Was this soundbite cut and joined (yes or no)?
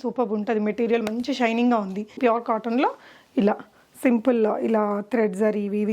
yes